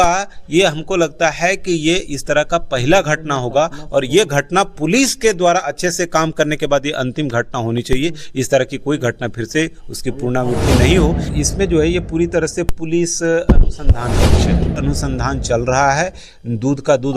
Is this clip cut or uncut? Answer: cut